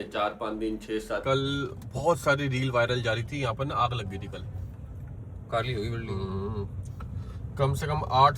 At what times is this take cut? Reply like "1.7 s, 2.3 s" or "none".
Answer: 1.2 s, 5.2 s